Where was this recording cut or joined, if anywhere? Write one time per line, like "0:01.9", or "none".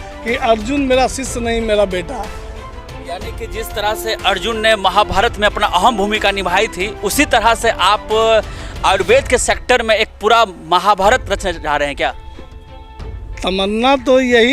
none